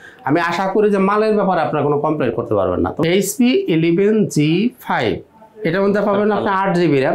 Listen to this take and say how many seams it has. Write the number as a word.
one